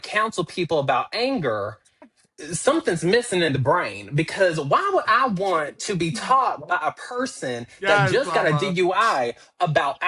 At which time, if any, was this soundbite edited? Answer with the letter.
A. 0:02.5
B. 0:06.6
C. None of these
C